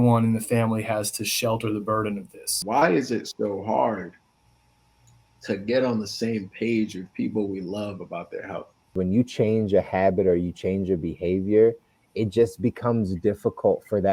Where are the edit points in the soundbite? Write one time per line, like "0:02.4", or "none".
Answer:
0:02.5
0:08.9